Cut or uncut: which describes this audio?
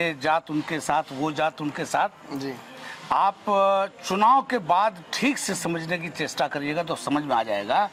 uncut